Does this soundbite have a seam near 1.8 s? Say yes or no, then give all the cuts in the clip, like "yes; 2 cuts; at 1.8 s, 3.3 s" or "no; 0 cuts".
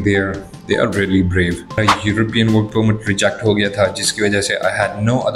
yes; 1 cut; at 1.8 s